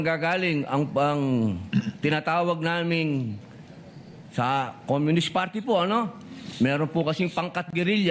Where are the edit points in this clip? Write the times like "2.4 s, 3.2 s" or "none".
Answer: none